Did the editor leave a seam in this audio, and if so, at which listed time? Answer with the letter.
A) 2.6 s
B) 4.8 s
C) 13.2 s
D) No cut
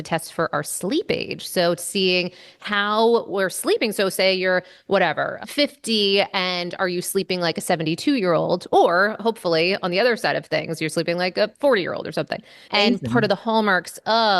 D